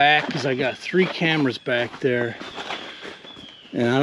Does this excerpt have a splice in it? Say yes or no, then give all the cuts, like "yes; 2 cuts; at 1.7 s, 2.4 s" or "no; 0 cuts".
no; 0 cuts